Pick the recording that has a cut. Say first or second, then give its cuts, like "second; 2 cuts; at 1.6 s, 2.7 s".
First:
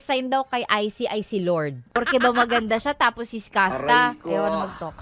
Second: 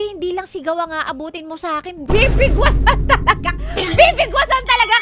first; 1 cut; at 1.8 s